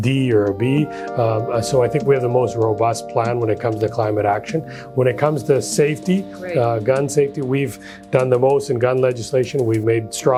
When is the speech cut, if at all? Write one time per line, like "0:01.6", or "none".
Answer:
none